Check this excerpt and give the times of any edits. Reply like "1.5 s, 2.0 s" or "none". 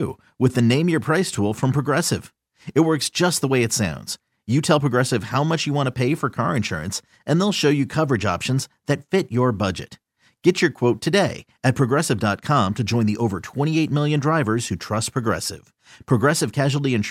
none